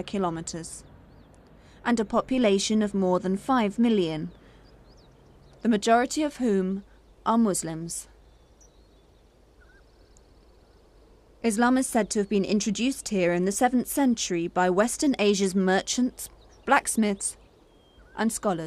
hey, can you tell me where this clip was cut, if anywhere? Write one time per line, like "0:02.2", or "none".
0:15.1

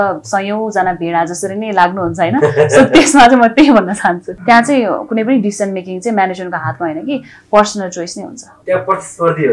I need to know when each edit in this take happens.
0:04.3
0:08.5

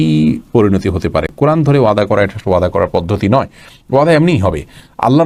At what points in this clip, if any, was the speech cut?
none

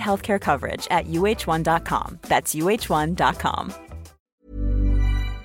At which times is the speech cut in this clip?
0:04.1

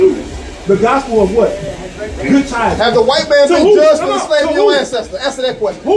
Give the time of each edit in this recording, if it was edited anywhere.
0:04.3

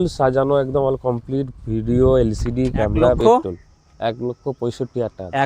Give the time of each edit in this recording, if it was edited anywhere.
0:03.2

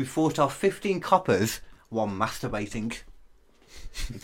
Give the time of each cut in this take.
none

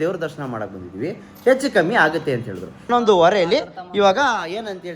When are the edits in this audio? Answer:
0:02.9

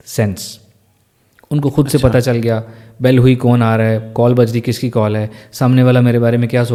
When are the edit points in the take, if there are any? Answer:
none

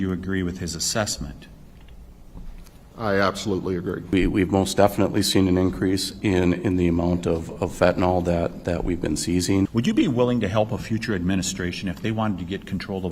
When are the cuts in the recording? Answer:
0:04.1

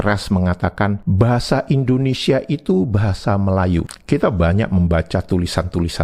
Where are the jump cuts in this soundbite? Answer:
0:01.0

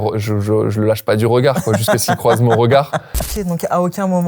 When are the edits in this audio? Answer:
0:03.3

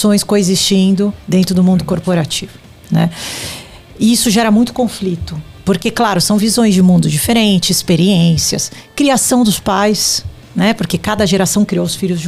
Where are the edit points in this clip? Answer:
none

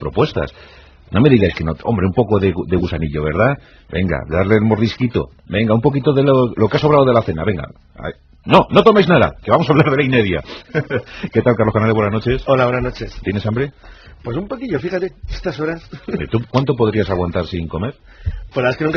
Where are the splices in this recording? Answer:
0:11.3

